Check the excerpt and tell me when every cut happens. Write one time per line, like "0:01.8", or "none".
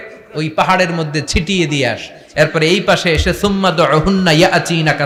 none